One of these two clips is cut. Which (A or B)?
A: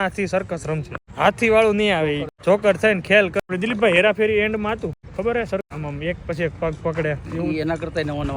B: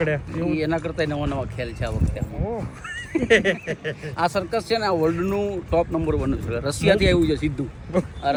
A